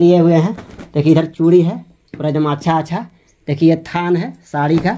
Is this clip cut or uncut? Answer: uncut